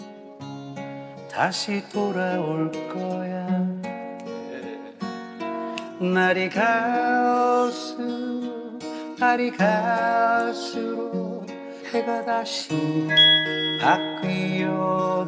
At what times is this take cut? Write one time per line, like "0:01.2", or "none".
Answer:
none